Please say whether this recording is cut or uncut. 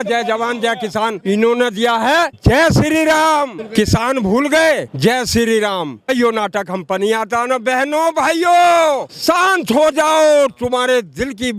cut